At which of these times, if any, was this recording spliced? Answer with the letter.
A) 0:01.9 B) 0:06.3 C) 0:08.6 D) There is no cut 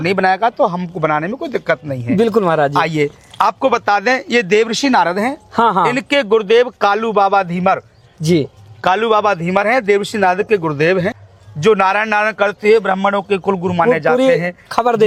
D